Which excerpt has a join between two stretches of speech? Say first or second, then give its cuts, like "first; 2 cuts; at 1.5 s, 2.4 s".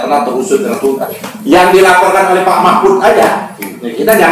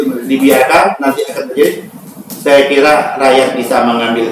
first; 1 cut; at 1.0 s